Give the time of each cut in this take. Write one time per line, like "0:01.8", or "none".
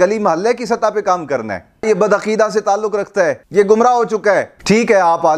0:01.8
0:03.4
0:04.5